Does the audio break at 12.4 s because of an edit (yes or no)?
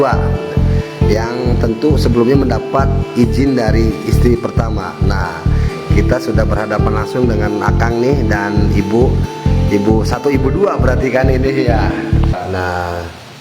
yes